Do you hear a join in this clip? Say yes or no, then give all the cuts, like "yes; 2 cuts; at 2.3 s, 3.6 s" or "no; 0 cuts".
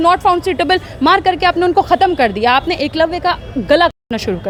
no; 0 cuts